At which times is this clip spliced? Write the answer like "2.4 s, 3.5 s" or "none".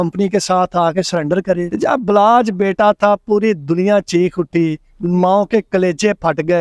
1.7 s